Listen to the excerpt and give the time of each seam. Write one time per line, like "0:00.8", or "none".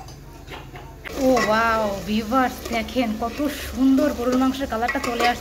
0:01.0